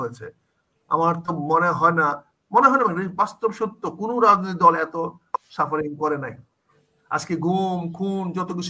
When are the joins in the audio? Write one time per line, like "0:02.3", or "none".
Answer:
none